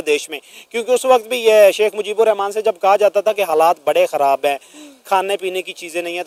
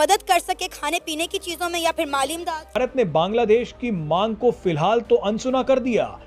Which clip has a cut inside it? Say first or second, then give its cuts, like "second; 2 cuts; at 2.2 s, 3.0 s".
second; 1 cut; at 2.8 s